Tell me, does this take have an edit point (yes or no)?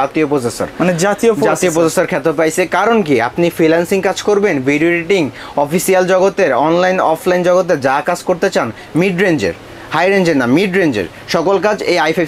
no